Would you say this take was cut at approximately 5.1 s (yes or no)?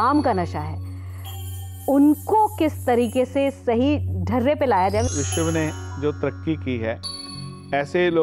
yes